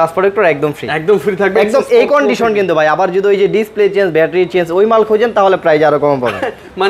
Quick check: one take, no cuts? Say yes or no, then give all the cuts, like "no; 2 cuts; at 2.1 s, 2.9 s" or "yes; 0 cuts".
yes; 0 cuts